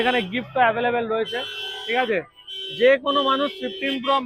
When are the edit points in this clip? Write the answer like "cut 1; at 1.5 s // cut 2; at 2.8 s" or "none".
none